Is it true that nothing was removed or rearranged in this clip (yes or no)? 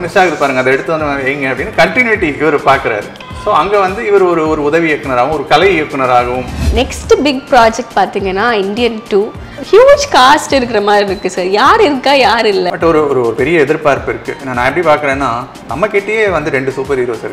no